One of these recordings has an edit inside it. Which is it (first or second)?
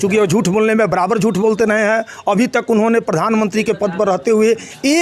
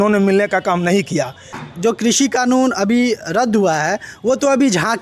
second